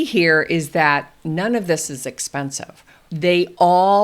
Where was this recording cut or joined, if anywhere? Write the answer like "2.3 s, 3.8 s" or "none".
3.1 s